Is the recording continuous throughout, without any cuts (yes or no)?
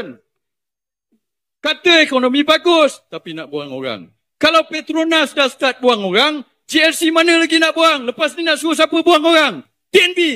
no